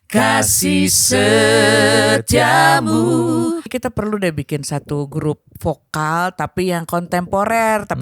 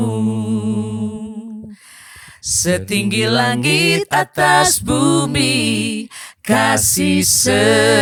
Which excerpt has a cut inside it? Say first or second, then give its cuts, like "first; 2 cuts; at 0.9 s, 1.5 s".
first; 1 cut; at 3.7 s